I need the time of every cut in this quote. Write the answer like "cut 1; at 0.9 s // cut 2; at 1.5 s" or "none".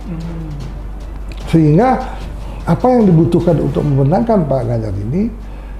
none